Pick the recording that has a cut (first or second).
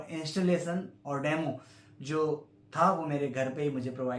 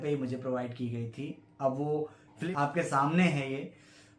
second